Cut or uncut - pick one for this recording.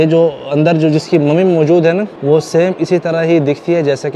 cut